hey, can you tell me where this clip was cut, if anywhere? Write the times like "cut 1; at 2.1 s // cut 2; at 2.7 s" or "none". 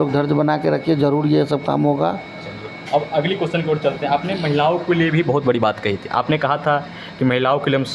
none